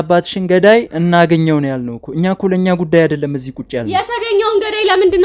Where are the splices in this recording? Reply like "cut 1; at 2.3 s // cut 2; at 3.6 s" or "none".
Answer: none